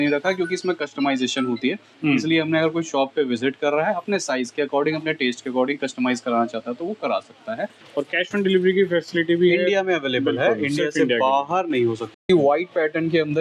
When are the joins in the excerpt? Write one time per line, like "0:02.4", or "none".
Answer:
0:07.8
0:12.1